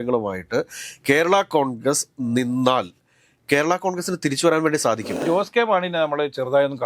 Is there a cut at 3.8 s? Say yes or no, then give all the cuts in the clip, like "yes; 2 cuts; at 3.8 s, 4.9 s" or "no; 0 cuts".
no; 1 cut; at 5.2 s